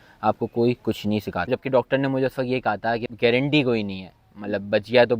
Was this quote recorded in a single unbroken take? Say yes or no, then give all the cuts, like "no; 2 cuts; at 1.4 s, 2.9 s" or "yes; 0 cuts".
no; 2 cuts; at 1.5 s, 3.1 s